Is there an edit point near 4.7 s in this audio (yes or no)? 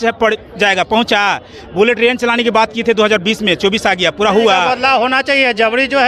yes